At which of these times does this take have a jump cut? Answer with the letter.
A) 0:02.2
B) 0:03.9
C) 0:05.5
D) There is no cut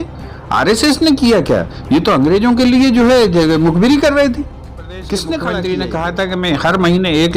C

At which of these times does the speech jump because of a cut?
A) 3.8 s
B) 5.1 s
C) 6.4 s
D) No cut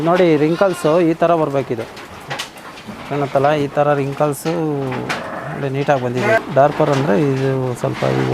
C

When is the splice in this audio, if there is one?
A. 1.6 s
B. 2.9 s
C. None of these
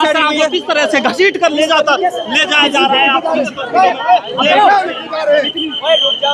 C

